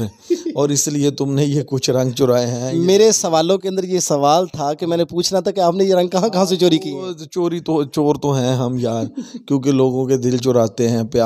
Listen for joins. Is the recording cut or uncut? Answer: uncut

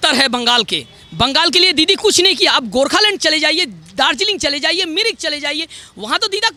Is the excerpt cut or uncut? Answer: uncut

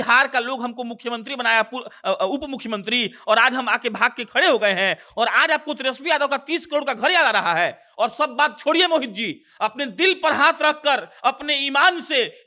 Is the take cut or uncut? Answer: uncut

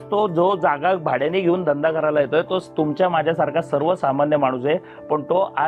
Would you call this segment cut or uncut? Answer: uncut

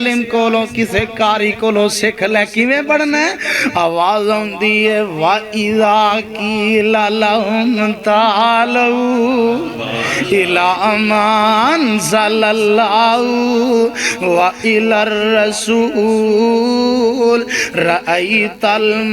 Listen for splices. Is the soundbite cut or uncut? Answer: uncut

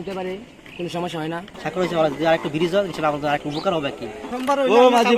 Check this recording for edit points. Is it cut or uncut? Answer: cut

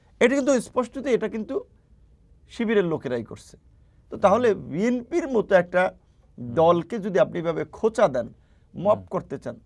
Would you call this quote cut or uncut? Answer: uncut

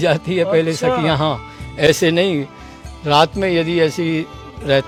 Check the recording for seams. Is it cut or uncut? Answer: uncut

